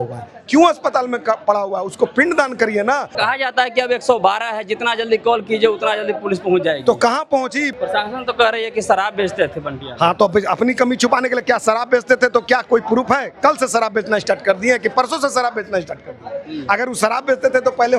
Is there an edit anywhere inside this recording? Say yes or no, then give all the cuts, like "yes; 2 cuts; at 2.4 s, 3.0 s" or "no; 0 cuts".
yes; 2 cuts; at 3.2 s, 7.7 s